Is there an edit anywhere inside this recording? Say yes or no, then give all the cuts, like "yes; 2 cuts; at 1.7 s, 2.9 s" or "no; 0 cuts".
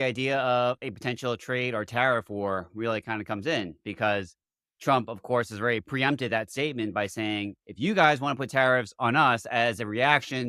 no; 0 cuts